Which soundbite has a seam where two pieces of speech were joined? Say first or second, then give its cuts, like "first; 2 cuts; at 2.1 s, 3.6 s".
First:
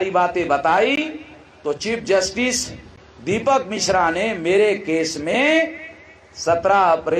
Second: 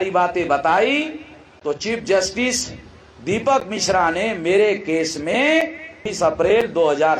second; 1 cut; at 6.1 s